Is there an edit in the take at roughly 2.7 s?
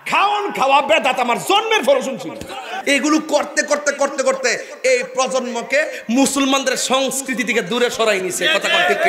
yes; 1 cut; at 2.7 s

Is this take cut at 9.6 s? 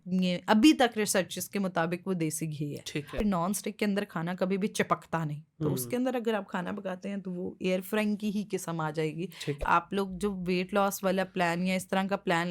yes; 2 cuts; at 3.2 s, 9.6 s

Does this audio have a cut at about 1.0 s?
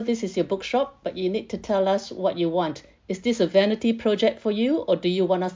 no; 0 cuts

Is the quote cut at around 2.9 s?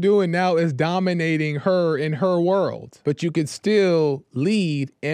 yes; 1 cut; at 2.9 s

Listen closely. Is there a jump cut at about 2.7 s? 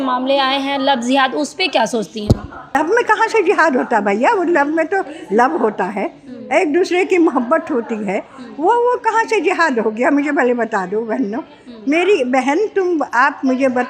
yes; 1 cut; at 2.7 s

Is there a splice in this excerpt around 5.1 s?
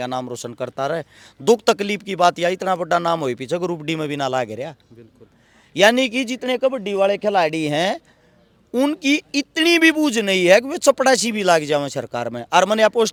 no; 0 cuts

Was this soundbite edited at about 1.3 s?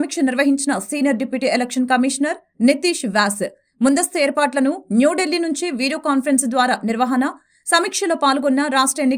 no; 0 cuts

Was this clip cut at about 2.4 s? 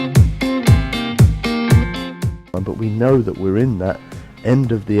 yes; 1 cut; at 2.4 s

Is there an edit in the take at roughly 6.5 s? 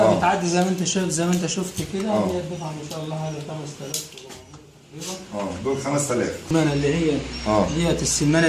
yes; 1 cut; at 6.5 s

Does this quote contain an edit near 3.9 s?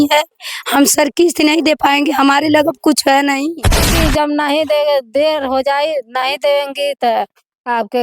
yes; 1 cut; at 3.9 s

